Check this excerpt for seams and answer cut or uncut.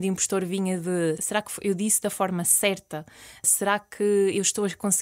cut